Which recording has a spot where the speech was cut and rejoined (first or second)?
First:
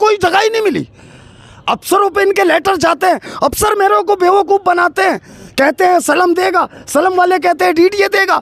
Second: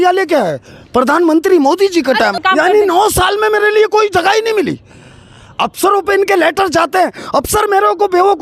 second